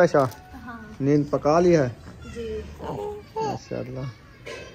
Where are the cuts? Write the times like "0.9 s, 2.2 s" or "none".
none